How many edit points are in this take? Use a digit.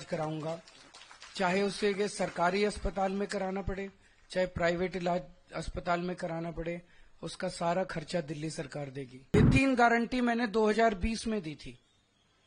1